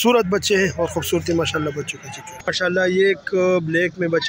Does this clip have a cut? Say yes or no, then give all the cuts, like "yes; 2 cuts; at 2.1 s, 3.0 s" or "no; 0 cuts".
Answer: yes; 1 cut; at 2.5 s